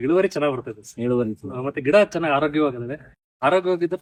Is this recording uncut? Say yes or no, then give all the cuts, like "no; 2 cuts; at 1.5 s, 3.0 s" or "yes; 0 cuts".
yes; 0 cuts